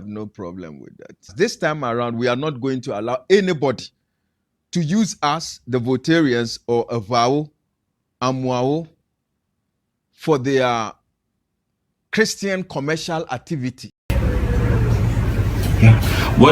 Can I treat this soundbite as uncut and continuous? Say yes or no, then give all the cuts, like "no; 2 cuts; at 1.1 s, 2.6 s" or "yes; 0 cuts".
no; 2 cuts; at 1.3 s, 14.1 s